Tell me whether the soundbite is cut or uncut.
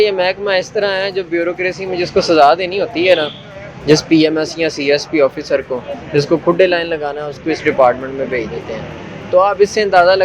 uncut